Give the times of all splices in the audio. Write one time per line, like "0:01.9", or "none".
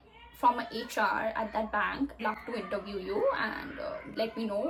none